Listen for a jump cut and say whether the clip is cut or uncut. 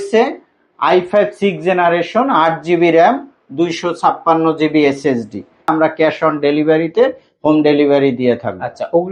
cut